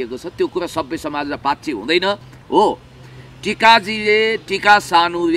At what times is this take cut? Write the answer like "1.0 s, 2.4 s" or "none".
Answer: 2.3 s